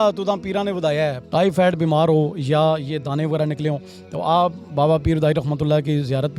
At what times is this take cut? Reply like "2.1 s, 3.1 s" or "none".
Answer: 1.2 s